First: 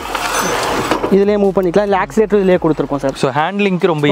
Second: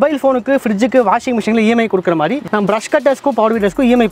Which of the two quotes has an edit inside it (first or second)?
second